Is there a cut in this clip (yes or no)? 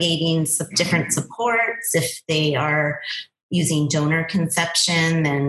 no